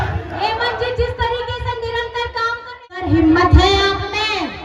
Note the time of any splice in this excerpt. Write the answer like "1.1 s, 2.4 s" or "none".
3.0 s